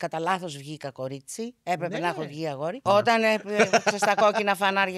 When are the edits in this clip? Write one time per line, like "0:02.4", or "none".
0:02.8